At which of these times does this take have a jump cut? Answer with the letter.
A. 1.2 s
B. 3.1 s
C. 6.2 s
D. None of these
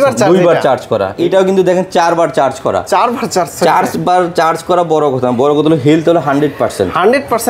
A